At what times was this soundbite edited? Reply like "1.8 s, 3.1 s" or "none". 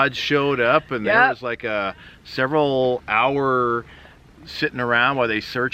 none